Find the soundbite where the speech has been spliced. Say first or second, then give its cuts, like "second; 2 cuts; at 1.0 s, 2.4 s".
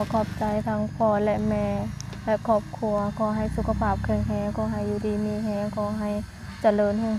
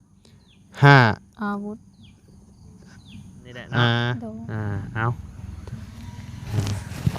second; 1 cut; at 4.2 s